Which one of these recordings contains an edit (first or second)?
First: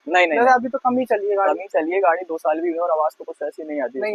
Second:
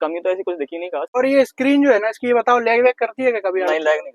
second